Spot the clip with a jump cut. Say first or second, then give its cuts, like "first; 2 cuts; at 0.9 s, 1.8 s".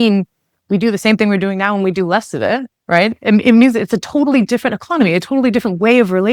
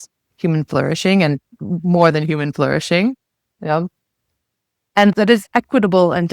second; 1 cut; at 5.1 s